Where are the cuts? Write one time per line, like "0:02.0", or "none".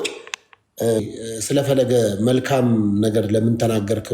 0:01.0